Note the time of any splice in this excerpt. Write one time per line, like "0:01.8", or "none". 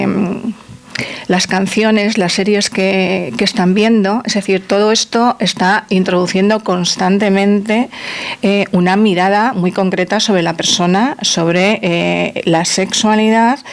none